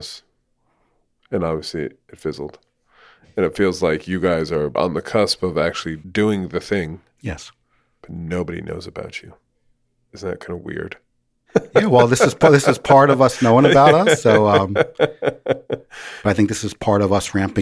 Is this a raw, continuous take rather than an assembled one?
no; 1 cut; at 16.0 s

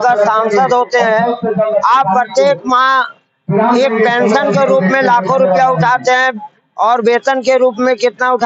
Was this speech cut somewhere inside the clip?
no; 0 cuts

